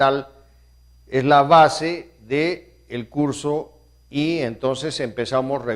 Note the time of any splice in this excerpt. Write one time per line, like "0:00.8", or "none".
0:01.6

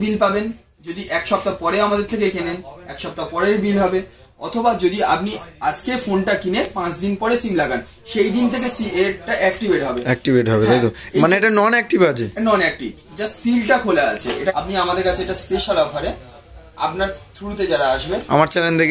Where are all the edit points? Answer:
0:14.5

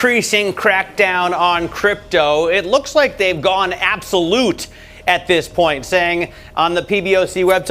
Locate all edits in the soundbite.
none

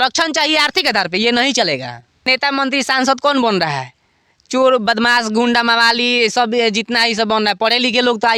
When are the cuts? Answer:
0:02.3

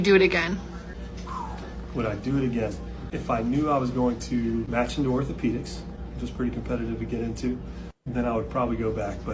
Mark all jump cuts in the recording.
0:06.3

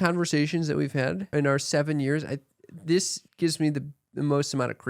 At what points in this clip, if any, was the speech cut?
0:01.3
0:03.2

